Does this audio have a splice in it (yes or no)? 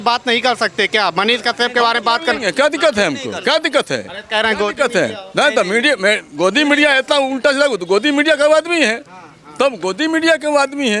no